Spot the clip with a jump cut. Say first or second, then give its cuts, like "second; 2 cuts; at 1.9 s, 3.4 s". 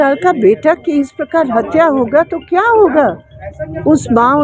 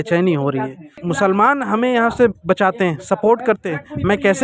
second; 1 cut; at 1.0 s